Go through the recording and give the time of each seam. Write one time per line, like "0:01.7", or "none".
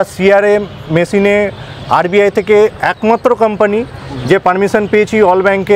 none